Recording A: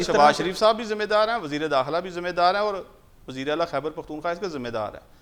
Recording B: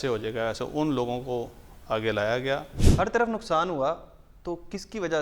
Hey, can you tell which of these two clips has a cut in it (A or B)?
B